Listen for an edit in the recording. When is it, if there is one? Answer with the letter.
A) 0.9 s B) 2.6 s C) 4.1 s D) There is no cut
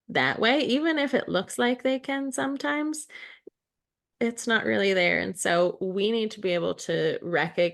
C